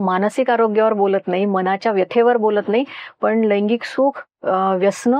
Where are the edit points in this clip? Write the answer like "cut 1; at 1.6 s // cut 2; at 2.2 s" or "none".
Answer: none